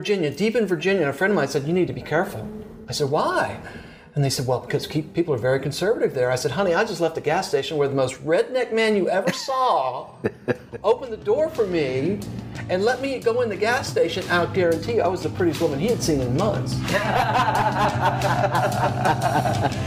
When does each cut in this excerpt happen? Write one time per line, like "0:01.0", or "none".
none